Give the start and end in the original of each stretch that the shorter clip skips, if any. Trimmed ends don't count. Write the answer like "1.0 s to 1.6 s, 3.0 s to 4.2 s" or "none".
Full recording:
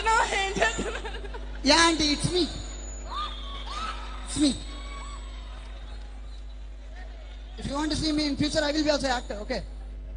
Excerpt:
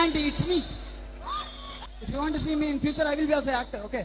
3.6 s to 7.4 s